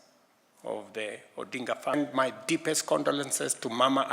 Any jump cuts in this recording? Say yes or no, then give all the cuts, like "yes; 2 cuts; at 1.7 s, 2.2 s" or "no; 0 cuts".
yes; 1 cut; at 1.9 s